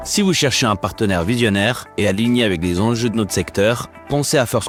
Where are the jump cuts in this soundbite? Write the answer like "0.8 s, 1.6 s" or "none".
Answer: none